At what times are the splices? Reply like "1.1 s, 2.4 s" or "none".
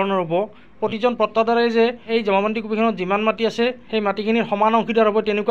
0.8 s, 2.1 s, 3.8 s